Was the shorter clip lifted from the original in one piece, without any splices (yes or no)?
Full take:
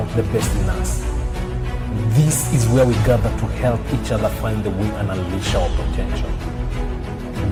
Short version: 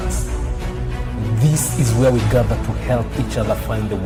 yes